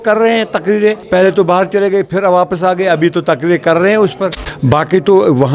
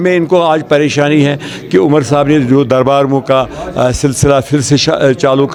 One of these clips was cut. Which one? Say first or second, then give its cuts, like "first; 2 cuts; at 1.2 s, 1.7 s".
first; 2 cuts; at 1.0 s, 4.5 s